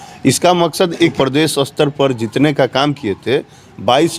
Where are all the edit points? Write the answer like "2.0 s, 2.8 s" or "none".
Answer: 1.1 s